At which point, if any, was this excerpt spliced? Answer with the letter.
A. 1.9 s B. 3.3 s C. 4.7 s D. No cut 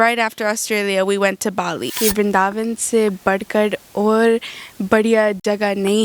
A